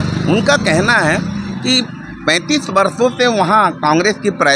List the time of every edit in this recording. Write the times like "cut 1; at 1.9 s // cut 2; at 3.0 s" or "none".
none